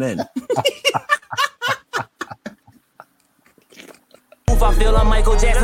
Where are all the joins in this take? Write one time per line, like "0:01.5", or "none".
0:04.5